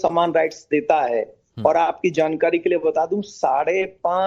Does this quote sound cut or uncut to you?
cut